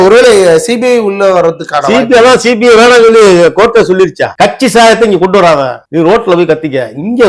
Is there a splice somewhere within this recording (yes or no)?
yes